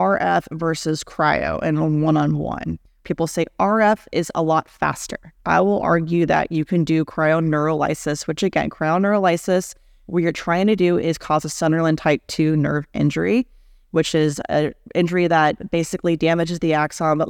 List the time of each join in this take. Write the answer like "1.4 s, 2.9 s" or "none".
3.0 s, 5.3 s